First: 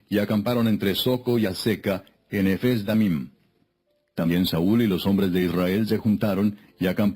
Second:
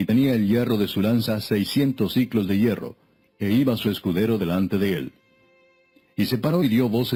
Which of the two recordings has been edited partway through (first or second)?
first